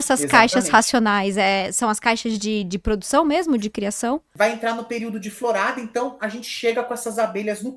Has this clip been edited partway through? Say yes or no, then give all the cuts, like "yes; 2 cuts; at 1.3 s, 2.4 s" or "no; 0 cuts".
yes; 1 cut; at 4.3 s